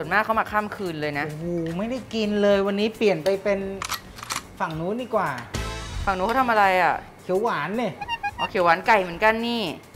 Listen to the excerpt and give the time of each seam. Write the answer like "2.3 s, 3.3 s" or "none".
none